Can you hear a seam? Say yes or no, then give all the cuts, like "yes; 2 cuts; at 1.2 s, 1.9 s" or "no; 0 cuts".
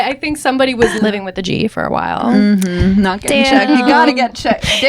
yes; 1 cut; at 0.9 s